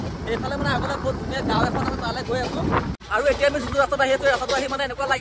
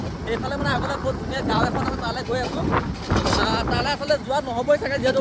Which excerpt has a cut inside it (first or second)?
first